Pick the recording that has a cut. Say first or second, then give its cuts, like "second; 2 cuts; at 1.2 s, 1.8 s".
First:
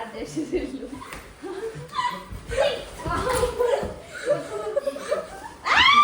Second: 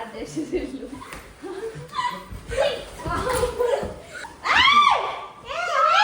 second; 1 cut; at 4.1 s